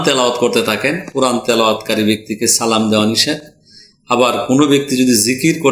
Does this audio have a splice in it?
no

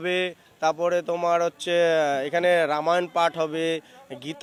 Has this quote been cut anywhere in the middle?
no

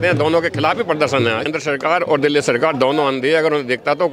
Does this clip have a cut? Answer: yes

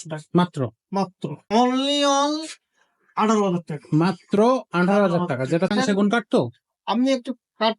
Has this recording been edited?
yes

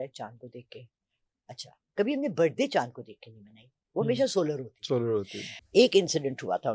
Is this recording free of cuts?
no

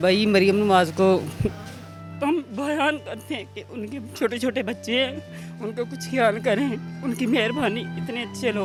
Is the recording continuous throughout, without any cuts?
yes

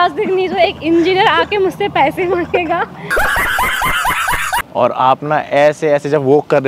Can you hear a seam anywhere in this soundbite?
yes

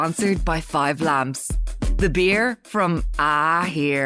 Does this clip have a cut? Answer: no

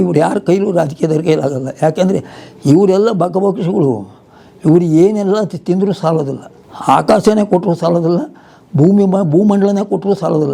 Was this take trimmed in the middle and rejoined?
no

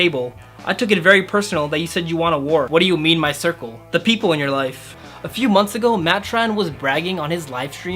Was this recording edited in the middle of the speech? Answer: yes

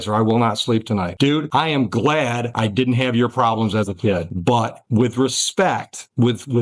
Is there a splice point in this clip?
no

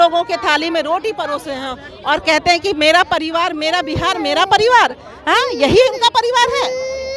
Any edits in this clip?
no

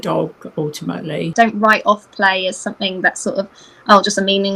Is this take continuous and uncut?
no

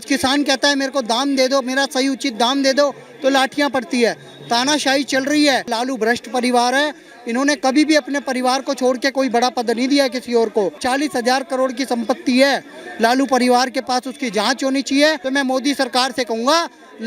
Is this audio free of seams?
no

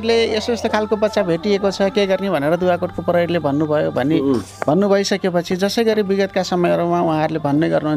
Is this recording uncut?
yes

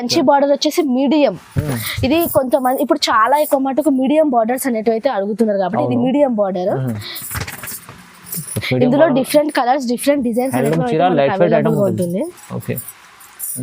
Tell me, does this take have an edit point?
no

